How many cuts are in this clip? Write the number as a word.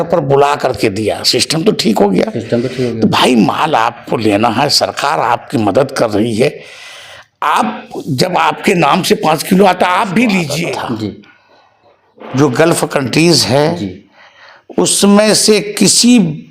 one